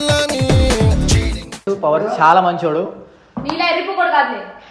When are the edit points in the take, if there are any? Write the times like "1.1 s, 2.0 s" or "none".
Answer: 1.6 s